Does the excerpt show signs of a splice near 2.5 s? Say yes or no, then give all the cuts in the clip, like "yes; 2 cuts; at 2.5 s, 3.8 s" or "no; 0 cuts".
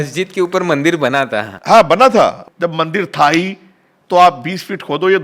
yes; 1 cut; at 2.5 s